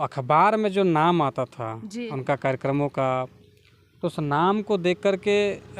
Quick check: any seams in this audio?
no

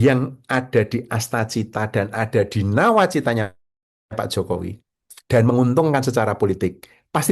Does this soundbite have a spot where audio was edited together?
no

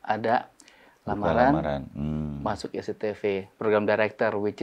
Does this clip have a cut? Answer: no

